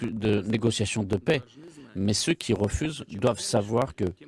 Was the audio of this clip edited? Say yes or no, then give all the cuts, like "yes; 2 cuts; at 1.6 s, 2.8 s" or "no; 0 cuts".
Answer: yes; 1 cut; at 0.9 s